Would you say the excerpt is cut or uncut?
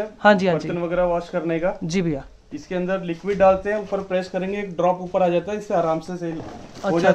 uncut